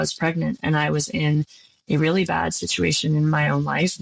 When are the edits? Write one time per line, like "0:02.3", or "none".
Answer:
none